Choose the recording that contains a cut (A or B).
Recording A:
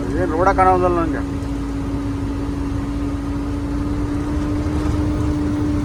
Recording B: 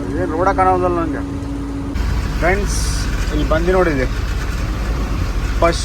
B